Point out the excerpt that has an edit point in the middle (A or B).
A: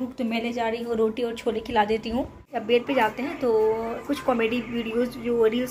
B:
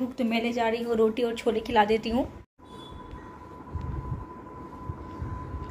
A